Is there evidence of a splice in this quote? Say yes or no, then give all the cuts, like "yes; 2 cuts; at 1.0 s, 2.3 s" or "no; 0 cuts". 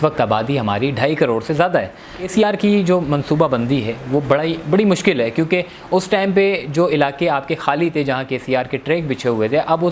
yes; 1 cut; at 2.4 s